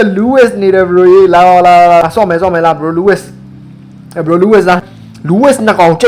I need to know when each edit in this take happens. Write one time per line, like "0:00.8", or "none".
0:02.0
0:04.8